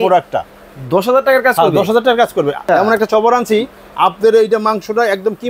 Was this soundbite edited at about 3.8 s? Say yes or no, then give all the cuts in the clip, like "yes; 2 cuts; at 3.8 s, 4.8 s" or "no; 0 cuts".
no; 1 cut; at 2.6 s